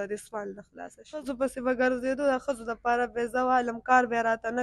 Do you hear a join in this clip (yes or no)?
yes